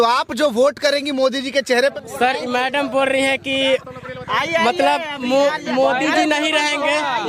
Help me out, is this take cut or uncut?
cut